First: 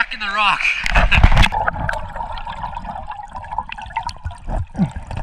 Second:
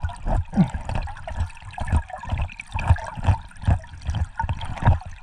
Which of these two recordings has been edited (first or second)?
first